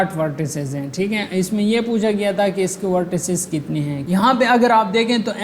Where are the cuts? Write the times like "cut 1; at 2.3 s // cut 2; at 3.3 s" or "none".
cut 1; at 4.1 s

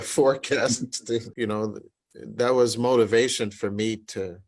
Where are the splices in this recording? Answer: cut 1; at 1.3 s

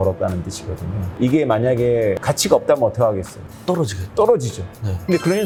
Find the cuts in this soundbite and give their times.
none

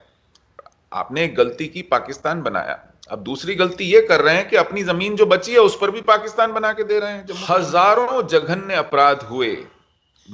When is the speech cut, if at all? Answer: cut 1; at 7.3 s

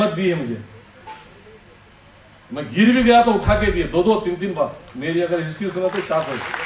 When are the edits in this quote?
none

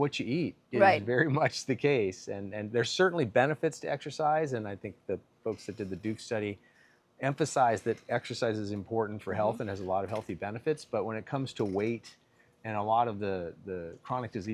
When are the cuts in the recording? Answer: none

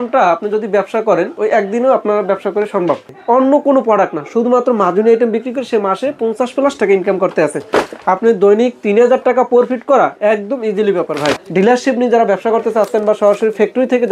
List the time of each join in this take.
cut 1; at 3.2 s // cut 2; at 7.9 s // cut 3; at 11.4 s

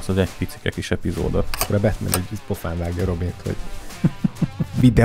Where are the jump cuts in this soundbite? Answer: cut 1; at 1.6 s

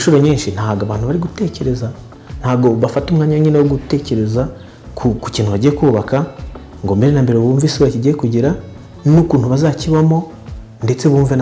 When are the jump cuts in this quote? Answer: cut 1; at 8.9 s

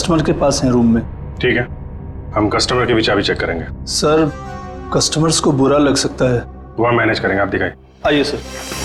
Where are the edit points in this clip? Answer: none

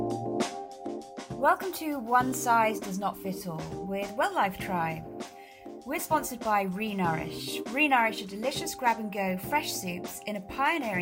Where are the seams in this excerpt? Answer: cut 1; at 1.4 s

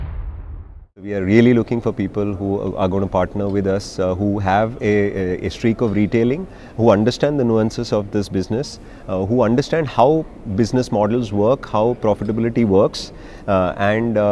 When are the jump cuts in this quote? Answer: cut 1; at 1.0 s

